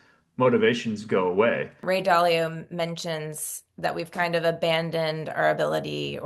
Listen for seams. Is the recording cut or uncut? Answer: cut